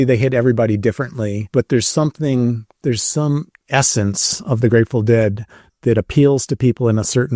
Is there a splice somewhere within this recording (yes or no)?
yes